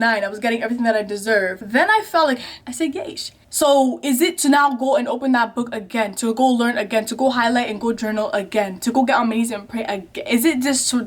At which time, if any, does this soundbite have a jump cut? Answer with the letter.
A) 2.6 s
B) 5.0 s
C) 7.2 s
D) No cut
A